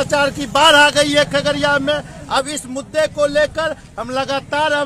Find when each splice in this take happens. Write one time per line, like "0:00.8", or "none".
none